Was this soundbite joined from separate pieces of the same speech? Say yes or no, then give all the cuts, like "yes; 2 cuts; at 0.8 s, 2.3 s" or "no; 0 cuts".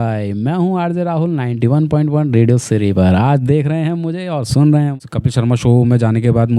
yes; 1 cut; at 4.9 s